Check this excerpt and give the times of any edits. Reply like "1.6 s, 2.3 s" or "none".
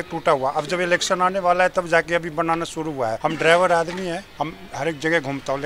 3.2 s, 4.3 s